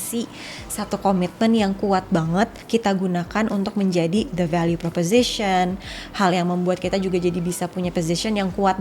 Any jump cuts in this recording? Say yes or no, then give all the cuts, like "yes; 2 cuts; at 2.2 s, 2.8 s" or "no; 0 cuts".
no; 0 cuts